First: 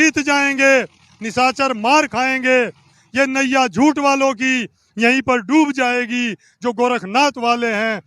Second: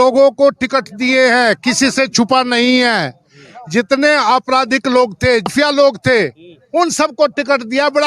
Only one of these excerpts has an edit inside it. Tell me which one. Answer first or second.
second